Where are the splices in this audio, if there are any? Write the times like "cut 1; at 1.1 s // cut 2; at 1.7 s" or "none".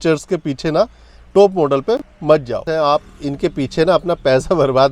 cut 1; at 2.7 s